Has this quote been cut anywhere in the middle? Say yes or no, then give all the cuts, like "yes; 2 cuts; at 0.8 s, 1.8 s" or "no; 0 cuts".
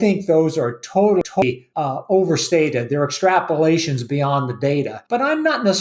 yes; 2 cuts; at 1.2 s, 5.0 s